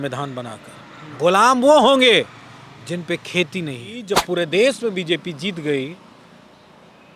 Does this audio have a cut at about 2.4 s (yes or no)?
no